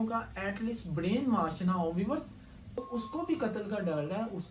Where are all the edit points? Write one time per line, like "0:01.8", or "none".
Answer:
0:02.8